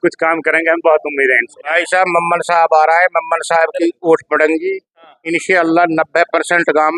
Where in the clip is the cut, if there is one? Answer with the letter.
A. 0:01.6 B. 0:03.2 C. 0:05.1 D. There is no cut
A